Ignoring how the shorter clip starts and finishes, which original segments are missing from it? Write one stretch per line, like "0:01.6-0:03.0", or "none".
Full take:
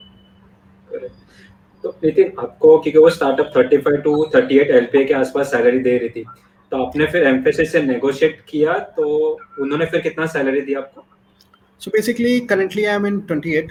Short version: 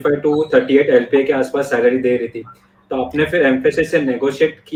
none